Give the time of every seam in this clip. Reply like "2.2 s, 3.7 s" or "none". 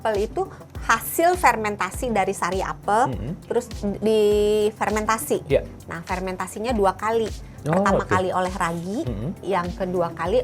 3.4 s